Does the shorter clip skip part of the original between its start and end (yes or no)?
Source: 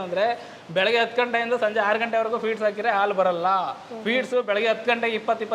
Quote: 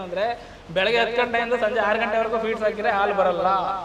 no